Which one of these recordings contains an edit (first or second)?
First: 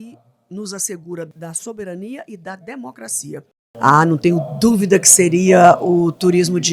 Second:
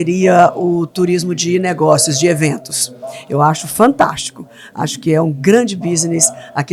first